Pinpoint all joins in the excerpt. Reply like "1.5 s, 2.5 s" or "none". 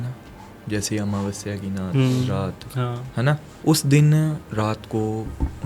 3.5 s, 4.4 s